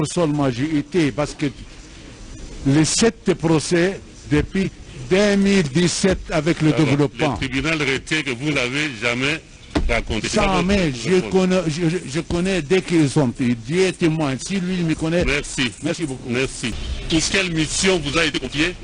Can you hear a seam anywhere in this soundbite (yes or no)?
yes